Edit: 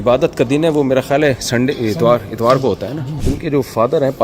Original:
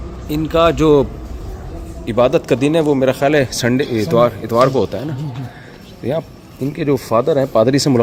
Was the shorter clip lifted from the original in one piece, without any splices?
no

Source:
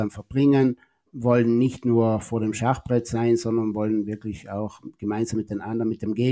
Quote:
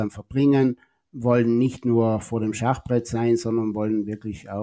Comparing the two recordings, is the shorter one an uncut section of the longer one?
yes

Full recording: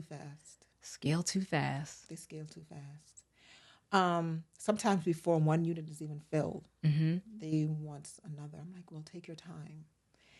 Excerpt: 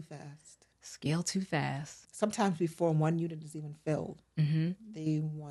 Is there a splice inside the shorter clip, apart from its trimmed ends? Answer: yes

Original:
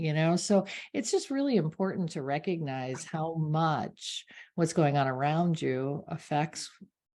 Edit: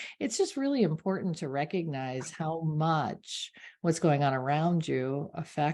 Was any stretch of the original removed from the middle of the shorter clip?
no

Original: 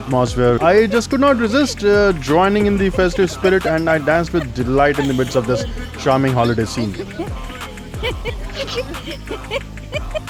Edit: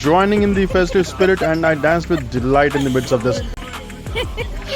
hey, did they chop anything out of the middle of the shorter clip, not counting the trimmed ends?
yes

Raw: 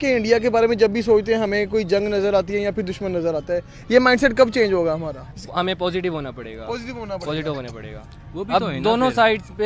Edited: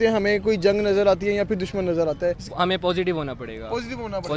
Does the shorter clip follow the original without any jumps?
no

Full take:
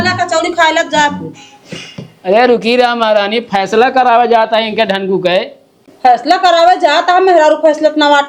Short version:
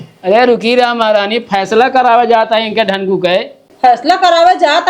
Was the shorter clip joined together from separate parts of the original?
yes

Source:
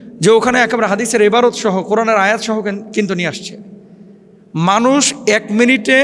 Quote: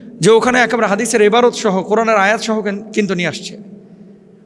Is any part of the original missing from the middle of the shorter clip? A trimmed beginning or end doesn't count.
no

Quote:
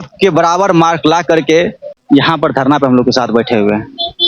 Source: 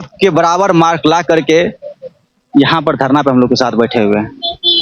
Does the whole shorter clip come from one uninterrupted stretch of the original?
no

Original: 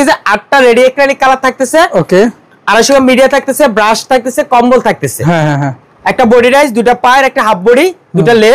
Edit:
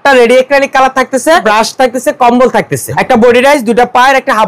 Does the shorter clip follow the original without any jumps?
no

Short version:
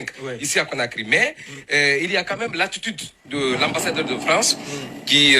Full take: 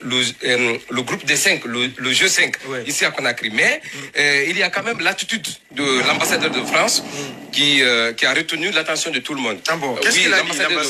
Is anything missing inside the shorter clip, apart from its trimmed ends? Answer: no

